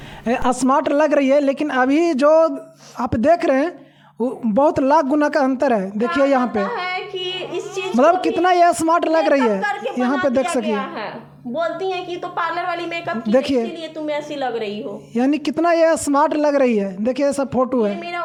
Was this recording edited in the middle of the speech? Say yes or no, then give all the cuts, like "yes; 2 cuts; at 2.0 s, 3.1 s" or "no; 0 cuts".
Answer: no; 0 cuts